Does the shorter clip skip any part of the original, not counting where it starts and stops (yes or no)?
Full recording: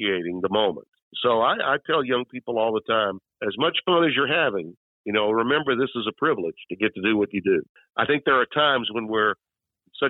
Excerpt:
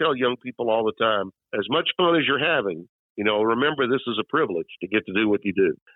no